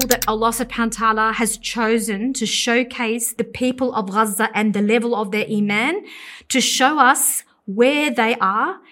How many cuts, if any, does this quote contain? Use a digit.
1